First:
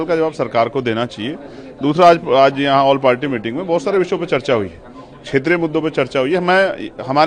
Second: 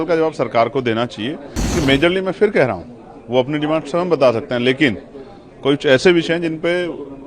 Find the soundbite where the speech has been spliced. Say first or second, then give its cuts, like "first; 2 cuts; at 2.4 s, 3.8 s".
second; 1 cut; at 1.6 s